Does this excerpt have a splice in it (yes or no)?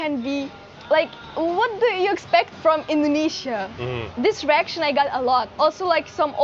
no